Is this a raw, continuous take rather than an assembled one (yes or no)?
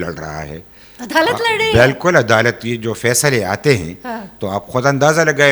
yes